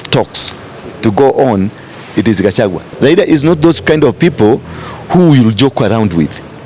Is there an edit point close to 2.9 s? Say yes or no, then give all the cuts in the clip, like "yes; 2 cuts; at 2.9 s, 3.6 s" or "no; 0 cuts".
yes; 1 cut; at 2.9 s